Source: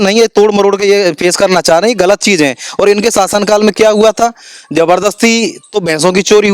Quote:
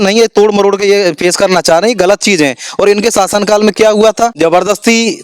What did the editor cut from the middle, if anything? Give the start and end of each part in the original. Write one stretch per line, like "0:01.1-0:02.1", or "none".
0:04.3-0:04.7